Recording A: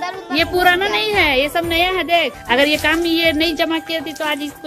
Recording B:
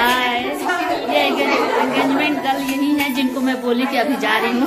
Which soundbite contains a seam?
A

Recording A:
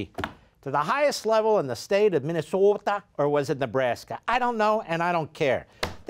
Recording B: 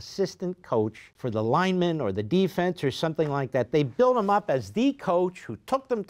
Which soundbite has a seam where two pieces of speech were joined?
B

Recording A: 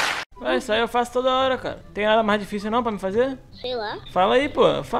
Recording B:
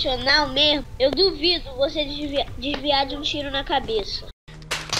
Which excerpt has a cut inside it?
A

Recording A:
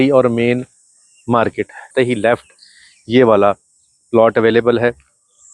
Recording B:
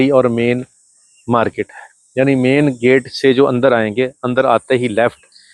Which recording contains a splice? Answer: A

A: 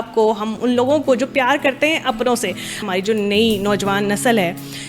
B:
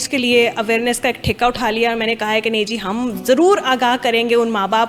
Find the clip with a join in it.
A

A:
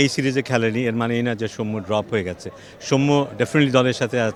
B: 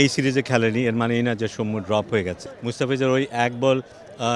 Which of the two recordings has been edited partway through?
B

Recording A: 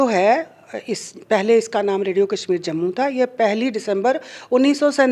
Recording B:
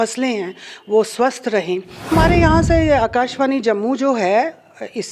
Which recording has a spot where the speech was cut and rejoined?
B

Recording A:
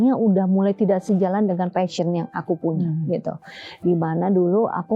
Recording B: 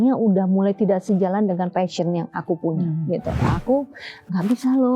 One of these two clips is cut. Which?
B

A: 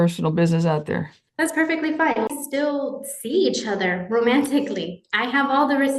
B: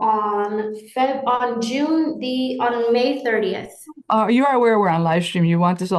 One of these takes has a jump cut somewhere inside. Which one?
A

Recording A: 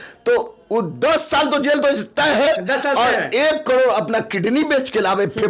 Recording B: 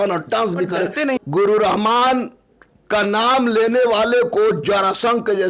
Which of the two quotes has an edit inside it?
B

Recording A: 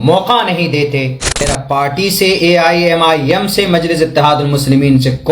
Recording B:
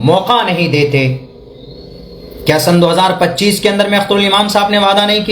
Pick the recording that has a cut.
A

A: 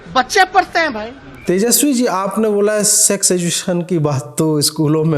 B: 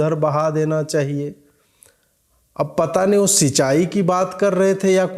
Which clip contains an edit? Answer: A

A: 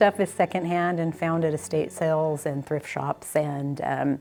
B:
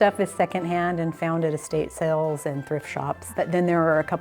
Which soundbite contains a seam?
B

